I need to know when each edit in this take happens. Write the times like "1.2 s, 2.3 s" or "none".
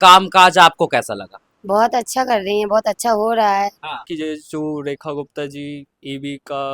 4.1 s